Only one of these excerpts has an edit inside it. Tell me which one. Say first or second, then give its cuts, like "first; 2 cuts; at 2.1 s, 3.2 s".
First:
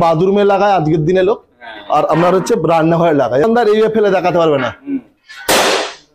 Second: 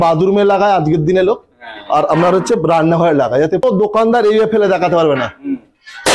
first; 1 cut; at 3.4 s